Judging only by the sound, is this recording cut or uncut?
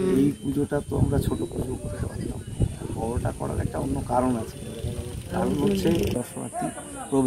cut